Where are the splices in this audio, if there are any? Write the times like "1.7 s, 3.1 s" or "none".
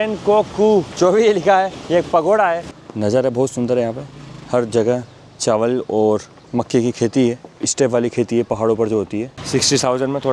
0.9 s, 1.8 s, 2.7 s, 9.4 s